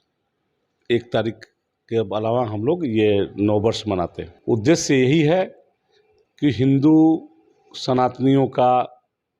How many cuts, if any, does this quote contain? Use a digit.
1